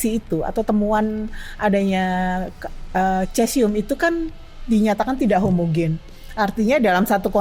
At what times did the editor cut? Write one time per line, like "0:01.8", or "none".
none

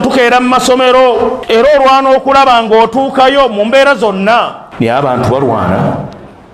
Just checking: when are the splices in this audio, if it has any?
0:01.4
0:04.6

